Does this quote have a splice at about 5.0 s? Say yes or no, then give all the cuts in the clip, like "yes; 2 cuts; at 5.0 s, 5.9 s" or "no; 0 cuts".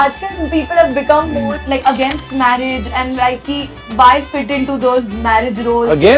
no; 1 cut; at 1.5 s